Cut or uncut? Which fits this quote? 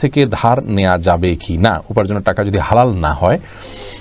uncut